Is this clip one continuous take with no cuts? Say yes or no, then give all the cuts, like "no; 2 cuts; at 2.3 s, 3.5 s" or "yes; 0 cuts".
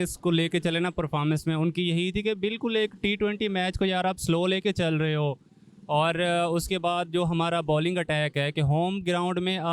yes; 0 cuts